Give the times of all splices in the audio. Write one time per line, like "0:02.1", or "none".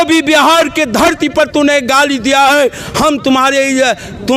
none